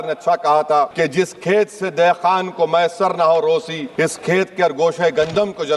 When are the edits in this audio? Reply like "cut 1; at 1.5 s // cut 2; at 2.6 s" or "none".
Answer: cut 1; at 0.9 s // cut 2; at 3.8 s